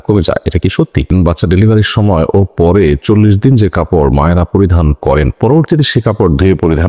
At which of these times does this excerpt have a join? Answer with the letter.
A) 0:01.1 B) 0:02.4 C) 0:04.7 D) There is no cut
A